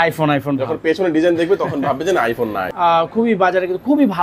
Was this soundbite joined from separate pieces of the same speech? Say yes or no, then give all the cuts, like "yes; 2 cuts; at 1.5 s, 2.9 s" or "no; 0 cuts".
yes; 1 cut; at 2.6 s